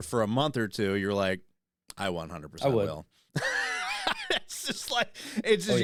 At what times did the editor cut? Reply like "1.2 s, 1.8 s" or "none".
none